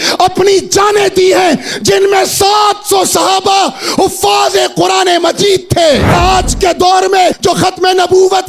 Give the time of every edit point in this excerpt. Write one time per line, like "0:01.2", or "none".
0:06.2
0:07.4